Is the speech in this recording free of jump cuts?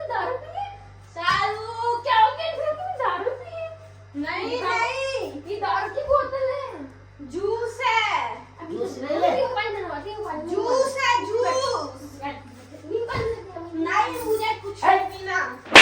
yes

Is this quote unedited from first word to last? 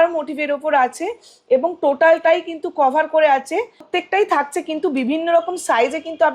no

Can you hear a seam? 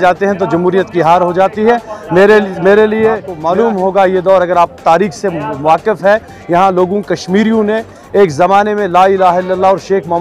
yes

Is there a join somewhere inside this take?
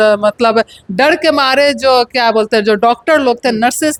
no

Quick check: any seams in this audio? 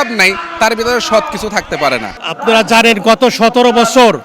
no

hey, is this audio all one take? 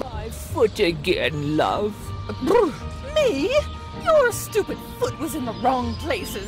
yes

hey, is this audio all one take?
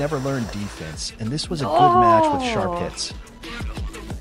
yes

